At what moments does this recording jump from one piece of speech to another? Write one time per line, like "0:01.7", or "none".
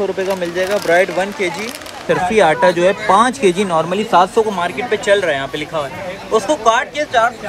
0:02.0